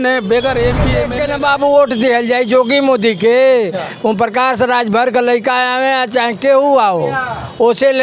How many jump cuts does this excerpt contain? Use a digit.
1